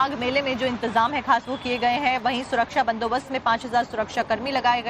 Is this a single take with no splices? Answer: no; 1 cut; at 1.1 s

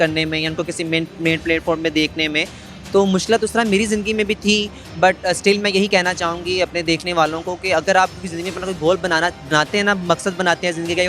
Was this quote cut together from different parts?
no; 0 cuts

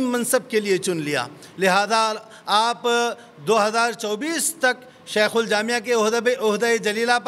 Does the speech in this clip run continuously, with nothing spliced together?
yes; 0 cuts

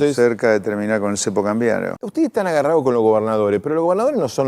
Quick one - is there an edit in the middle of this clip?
yes; 1 cut; at 1.9 s

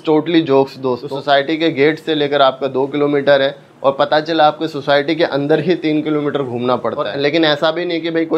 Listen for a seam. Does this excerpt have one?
yes; 2 cuts; at 1.1 s, 7.1 s

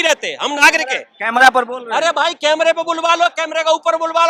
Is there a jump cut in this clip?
no; 0 cuts

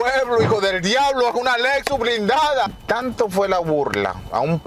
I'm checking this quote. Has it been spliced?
yes; 1 cut; at 2.7 s

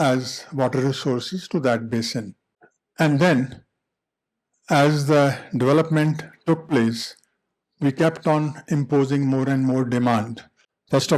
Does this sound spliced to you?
no; 0 cuts

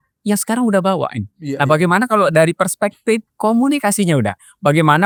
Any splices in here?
no; 0 cuts

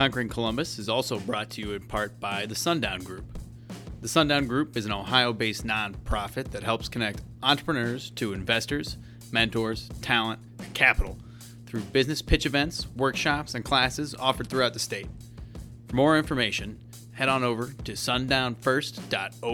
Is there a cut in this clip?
no; 0 cuts

